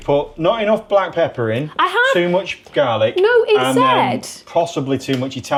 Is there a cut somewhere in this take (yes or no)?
no